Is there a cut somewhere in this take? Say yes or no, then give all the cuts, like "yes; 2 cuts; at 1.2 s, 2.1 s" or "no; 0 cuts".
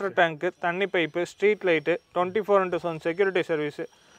no; 0 cuts